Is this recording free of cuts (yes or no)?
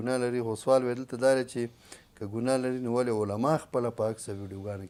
yes